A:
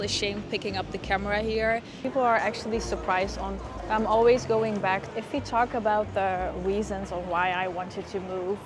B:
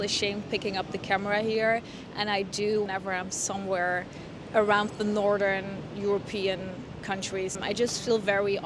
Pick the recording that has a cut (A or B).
A